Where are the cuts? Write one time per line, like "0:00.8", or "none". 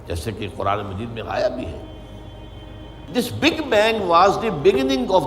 0:03.1